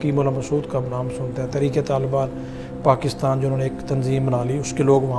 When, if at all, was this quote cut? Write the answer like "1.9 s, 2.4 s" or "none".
none

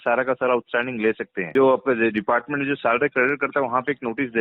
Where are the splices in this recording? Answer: 1.3 s

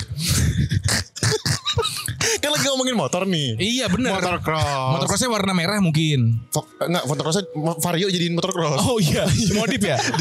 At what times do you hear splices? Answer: none

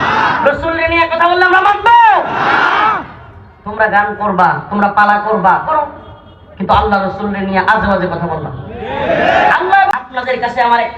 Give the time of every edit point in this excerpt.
9.9 s

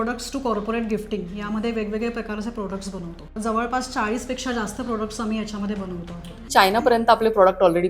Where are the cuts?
3.4 s, 6.5 s

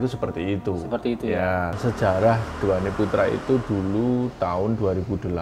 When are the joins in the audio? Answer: 1.8 s

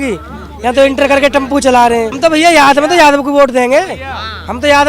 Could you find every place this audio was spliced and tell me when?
2.1 s

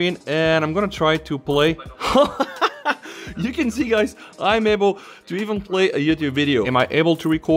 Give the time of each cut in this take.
6.7 s

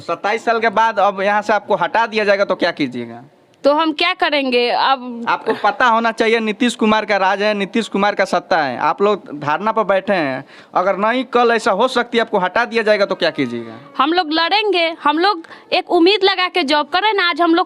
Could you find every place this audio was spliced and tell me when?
none

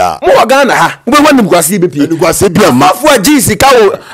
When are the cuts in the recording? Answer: none

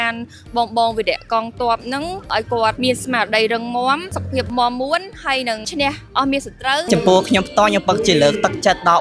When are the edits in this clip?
4.4 s

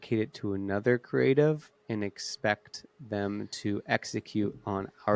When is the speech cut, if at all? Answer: none

